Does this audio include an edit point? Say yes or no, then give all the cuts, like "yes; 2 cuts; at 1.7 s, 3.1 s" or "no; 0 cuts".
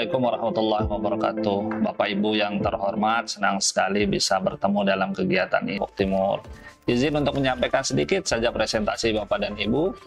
yes; 1 cut; at 5.8 s